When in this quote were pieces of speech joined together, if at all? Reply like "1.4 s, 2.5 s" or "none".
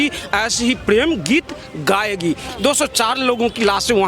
2.4 s